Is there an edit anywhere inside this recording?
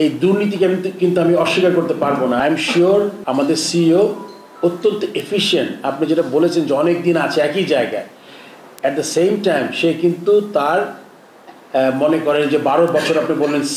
yes; 2 cuts; at 2.4 s, 3.2 s

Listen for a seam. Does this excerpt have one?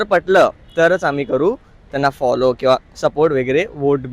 no; 0 cuts

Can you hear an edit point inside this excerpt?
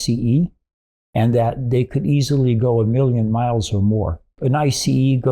yes; 1 cut; at 4.4 s

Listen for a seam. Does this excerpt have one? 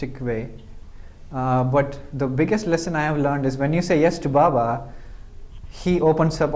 no; 0 cuts

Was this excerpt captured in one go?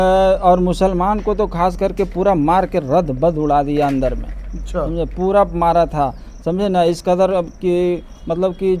yes; 0 cuts

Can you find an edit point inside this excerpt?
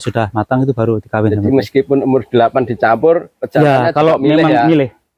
no; 0 cuts

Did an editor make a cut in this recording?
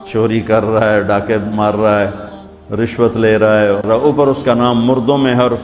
yes; 1 cut; at 3.9 s

